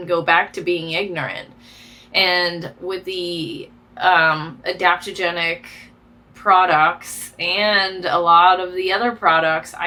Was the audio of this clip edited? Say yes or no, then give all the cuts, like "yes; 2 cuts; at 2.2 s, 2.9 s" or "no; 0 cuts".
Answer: no; 0 cuts